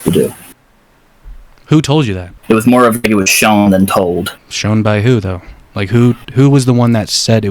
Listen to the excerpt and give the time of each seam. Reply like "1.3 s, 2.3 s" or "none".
2.3 s, 4.4 s